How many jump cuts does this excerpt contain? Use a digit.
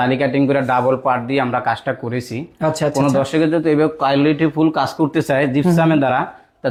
0